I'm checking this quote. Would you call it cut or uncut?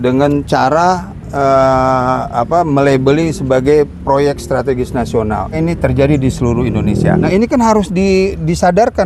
cut